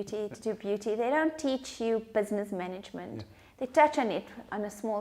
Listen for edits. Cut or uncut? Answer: uncut